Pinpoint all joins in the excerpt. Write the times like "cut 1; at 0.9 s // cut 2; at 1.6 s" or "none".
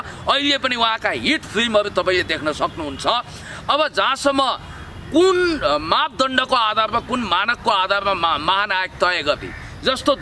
none